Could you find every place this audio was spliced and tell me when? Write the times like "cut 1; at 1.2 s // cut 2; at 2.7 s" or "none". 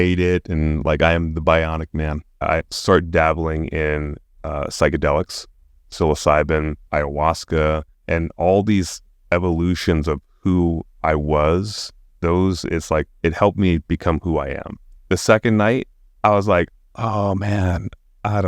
cut 1; at 2.4 s // cut 2; at 6.8 s // cut 3; at 14.9 s